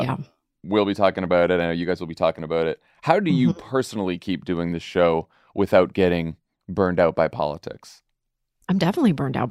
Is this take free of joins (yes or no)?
no